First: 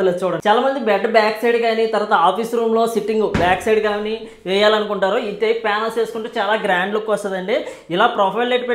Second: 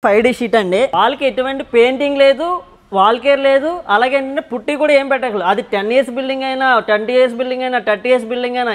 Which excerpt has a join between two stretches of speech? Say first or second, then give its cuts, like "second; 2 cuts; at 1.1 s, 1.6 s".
second; 1 cut; at 0.9 s